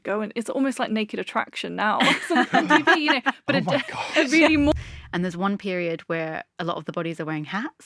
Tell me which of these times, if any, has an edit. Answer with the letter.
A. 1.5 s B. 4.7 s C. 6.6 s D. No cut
B